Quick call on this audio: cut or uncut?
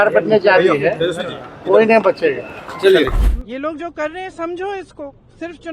cut